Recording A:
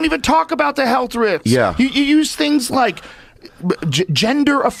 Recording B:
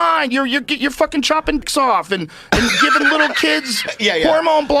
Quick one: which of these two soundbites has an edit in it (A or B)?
B